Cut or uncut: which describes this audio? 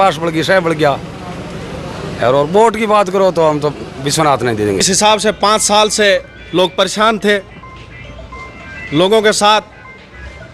cut